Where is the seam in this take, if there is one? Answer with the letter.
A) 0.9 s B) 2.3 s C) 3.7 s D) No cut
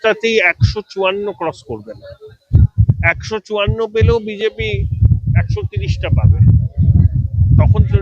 B